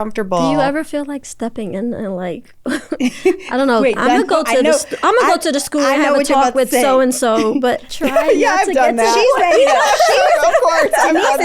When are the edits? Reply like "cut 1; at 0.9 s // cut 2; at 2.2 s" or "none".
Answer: cut 1; at 7.9 s